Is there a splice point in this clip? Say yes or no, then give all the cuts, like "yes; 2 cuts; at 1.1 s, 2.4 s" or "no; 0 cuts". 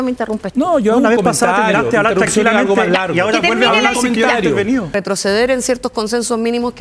yes; 1 cut; at 5.0 s